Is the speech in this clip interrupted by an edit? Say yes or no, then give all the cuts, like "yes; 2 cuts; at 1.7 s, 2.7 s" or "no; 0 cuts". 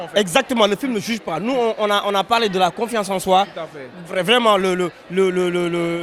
no; 0 cuts